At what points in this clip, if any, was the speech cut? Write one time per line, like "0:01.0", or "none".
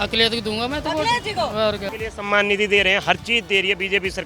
0:02.0